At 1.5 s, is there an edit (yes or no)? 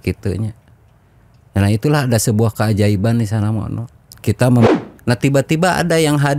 no